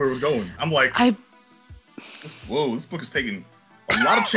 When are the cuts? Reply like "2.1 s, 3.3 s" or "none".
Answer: none

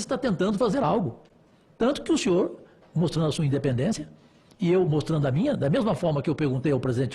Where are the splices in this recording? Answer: none

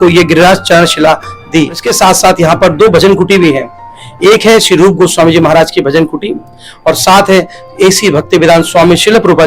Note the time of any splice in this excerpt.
1.9 s

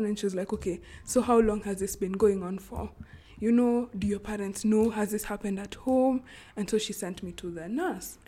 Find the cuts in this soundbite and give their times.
none

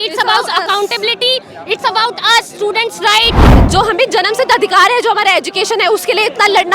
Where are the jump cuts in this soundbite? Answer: 3.5 s

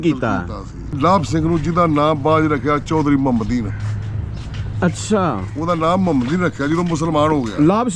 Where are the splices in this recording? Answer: 1.0 s

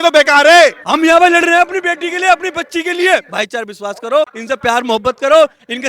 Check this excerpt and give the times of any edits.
0.8 s, 3.2 s, 4.4 s

